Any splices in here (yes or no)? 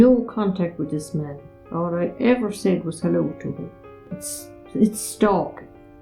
no